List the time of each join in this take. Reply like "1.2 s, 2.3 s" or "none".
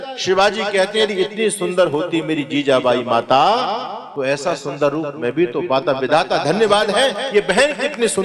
4.0 s